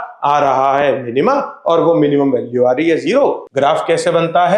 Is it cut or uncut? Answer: cut